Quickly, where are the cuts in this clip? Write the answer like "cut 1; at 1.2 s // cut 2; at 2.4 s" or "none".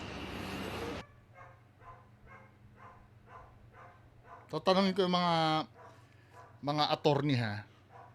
none

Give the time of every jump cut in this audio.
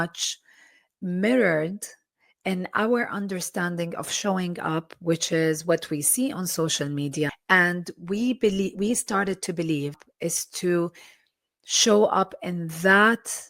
cut 1; at 7.4 s // cut 2; at 10.0 s

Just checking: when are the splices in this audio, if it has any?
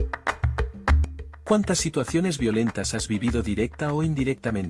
cut 1; at 1.0 s

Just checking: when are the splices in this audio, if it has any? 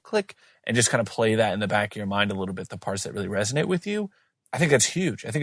none

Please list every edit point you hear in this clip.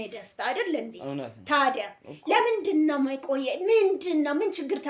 none

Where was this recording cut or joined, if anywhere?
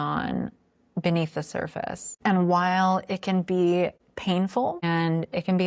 cut 1; at 2.1 s // cut 2; at 4.1 s // cut 3; at 4.8 s

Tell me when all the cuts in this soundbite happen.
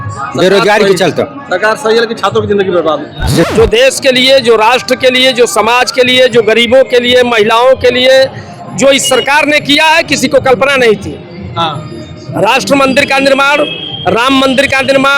cut 1; at 3.5 s

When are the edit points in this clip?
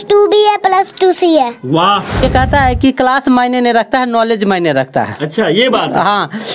cut 1; at 2.2 s

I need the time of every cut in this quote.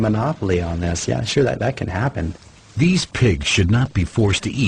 none

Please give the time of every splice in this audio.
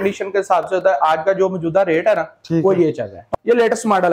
cut 1; at 3.2 s

